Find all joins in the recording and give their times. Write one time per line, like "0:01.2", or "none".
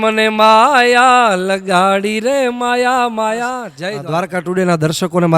0:03.7